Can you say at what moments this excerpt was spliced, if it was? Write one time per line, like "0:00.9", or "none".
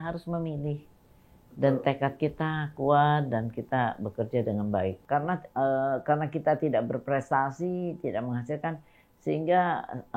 0:05.0

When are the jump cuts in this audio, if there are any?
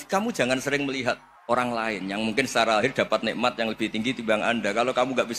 0:01.3

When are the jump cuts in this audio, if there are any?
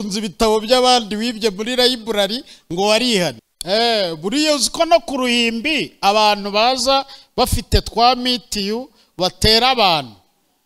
0:03.5

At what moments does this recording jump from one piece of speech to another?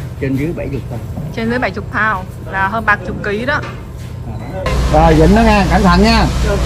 0:04.7

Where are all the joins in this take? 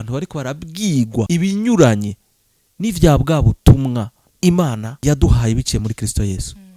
0:01.3
0:04.2
0:04.9

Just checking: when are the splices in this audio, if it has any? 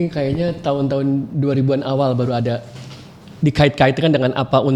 none

